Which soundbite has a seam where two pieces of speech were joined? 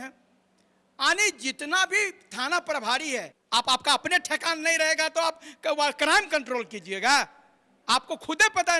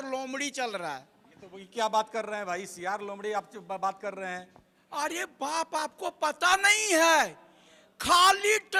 first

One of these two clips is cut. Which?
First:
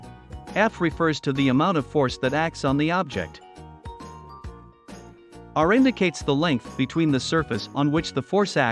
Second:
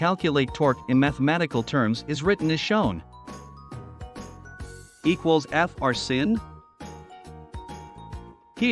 first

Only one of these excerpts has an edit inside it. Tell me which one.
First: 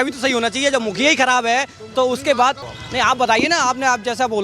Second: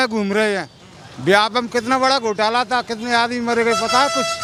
first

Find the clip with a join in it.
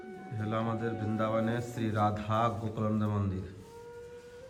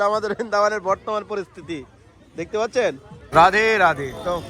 second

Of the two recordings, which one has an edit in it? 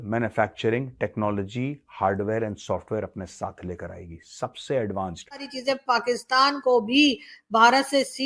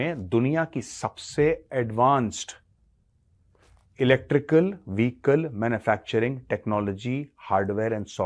first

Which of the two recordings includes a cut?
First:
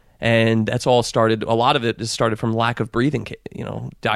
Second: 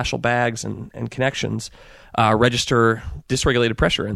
second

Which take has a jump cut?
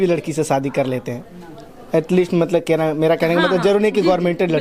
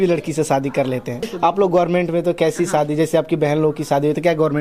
second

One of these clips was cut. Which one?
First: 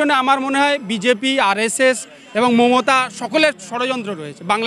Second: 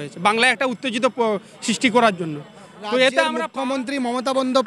second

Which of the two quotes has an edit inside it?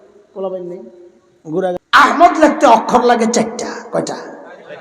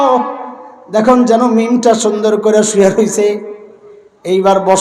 first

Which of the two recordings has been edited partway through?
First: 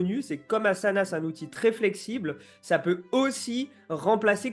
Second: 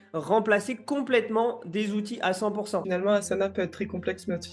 second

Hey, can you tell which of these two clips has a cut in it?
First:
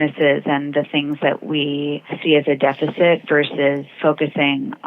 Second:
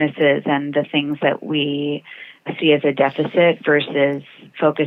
first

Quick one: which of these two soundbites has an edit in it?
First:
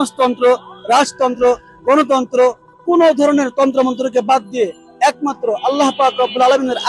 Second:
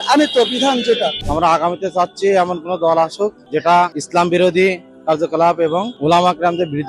second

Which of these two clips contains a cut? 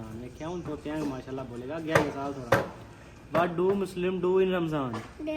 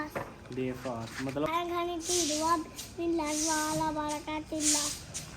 second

